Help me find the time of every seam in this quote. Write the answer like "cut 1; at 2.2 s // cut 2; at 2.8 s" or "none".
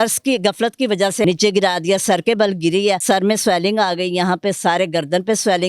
cut 1; at 1.2 s // cut 2; at 3.0 s